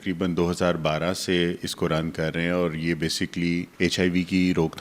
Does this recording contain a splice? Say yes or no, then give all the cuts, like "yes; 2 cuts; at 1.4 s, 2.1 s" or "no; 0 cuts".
yes; 1 cut; at 3.7 s